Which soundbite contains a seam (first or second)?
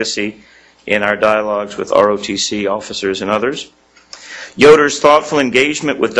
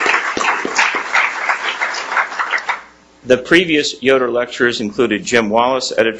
first